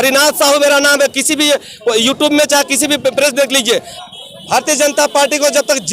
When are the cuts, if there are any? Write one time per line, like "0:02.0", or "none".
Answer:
0:03.9